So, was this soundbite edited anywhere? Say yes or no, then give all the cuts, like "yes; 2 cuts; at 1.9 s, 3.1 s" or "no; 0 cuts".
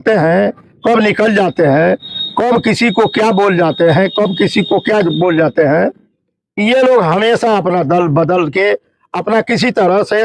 no; 0 cuts